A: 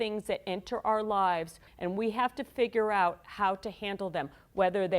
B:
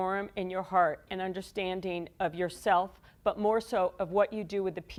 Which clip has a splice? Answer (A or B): A